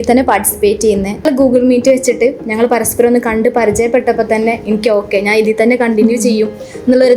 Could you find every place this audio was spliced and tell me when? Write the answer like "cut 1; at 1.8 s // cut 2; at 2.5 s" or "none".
cut 1; at 1.2 s